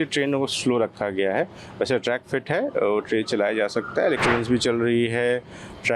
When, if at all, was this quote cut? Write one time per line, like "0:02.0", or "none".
0:04.2